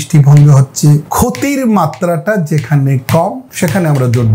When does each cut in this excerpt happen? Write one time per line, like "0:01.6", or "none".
0:01.1
0:03.4